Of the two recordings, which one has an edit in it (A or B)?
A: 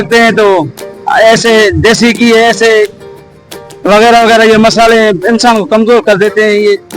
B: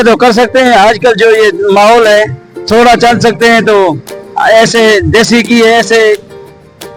A